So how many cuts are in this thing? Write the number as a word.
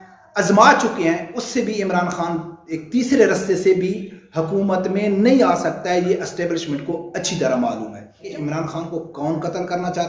one